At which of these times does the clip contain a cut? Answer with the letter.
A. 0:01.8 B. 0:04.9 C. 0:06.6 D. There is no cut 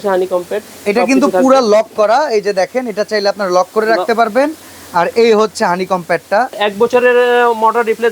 C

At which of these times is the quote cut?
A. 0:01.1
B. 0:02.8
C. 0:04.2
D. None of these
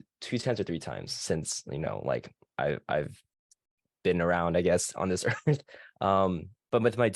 D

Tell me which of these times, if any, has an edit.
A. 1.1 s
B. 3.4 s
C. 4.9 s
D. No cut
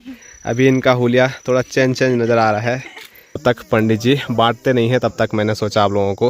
B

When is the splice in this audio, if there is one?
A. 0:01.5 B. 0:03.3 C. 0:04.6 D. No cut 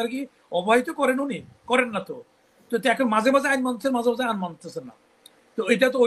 D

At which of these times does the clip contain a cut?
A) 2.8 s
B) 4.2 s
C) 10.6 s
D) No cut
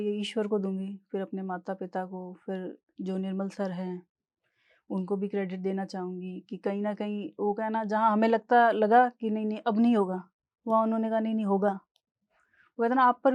D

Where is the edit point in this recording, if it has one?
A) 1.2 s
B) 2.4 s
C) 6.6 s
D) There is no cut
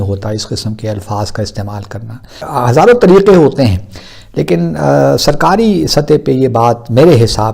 B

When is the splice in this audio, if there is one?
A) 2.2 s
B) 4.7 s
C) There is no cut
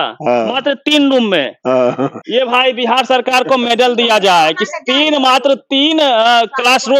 A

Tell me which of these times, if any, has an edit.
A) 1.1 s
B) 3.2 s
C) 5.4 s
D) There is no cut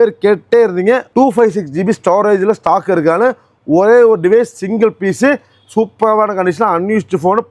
A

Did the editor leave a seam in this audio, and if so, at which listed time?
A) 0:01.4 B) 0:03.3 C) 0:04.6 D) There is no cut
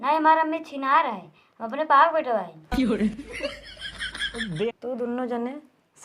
C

